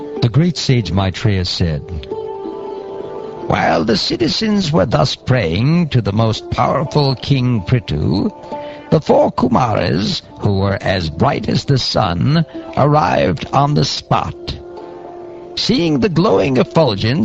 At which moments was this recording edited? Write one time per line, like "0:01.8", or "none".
0:07.3